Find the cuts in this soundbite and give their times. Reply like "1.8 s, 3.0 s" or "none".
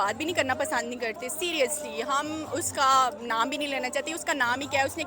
none